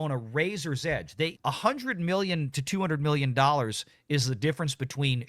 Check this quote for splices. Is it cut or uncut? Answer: cut